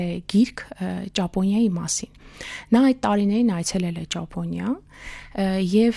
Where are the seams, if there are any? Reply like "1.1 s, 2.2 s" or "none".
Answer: none